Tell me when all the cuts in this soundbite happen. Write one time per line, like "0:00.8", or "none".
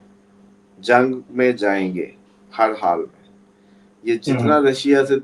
none